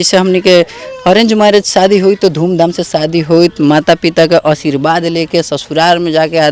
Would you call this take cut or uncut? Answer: uncut